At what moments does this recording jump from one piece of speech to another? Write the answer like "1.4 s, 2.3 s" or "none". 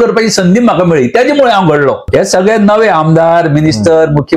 2.0 s

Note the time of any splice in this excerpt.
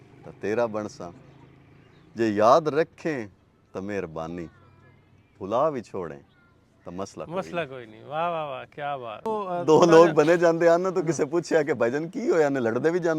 9.2 s

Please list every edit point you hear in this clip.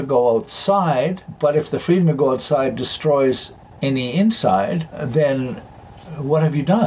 none

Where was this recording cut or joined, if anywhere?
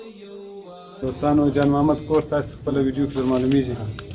1.0 s

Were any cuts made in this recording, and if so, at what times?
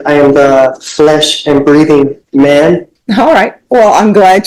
3.0 s

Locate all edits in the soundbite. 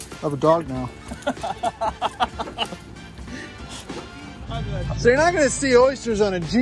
4.5 s

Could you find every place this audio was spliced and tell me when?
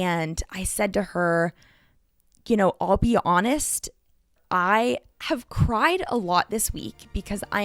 4.4 s

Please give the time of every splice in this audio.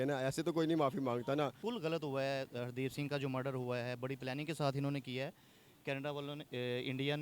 1.6 s

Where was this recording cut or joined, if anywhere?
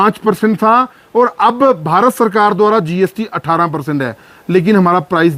none

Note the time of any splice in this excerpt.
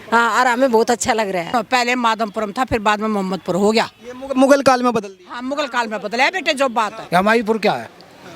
1.5 s, 7.0 s

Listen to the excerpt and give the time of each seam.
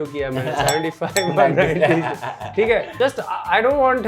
2.9 s

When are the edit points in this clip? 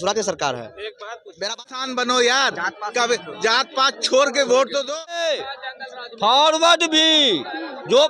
1.8 s, 5.3 s

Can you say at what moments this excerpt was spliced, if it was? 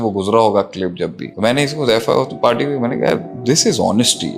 1.2 s

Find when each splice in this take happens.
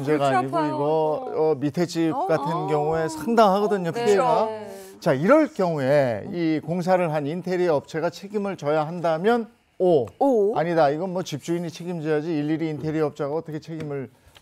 none

